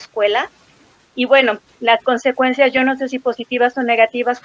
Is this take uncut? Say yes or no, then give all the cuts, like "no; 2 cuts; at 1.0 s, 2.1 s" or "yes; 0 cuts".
yes; 0 cuts